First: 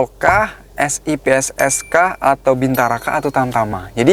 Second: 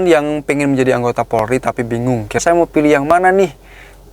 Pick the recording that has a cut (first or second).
second